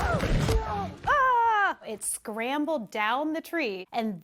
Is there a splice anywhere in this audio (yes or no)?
no